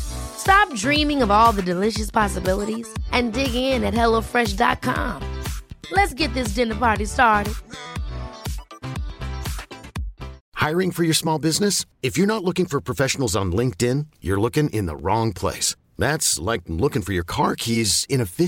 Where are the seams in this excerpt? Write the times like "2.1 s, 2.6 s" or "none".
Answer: 10.4 s